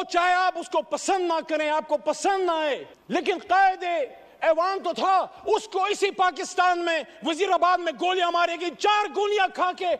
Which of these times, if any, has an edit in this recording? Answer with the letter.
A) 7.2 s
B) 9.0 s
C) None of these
C